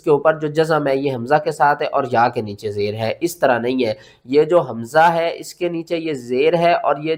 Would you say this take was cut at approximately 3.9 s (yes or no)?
no